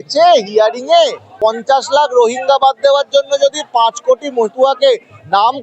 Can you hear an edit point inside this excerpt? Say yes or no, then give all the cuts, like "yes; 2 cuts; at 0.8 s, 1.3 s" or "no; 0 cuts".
yes; 1 cut; at 1.3 s